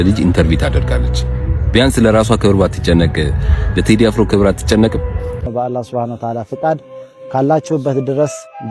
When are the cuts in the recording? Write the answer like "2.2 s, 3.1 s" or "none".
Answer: 5.3 s